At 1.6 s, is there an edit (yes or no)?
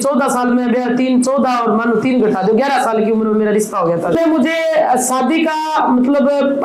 no